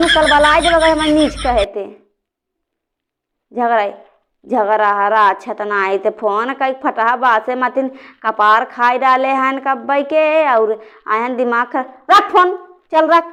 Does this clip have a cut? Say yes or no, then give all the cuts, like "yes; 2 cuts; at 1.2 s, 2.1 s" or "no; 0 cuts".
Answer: no; 0 cuts